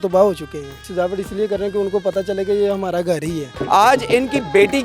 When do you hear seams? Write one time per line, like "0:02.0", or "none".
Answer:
0:00.9
0:03.5

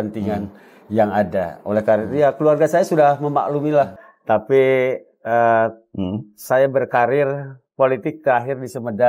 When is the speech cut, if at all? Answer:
0:04.0

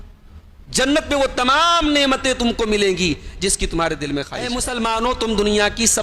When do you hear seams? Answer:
0:04.5

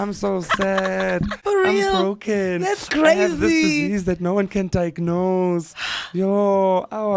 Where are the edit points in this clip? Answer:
0:01.4

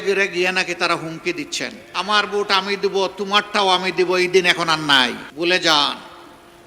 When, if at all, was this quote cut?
0:01.8
0:05.2

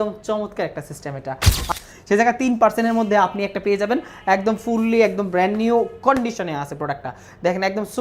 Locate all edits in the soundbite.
0:01.7

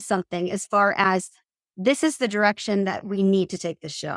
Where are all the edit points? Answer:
none

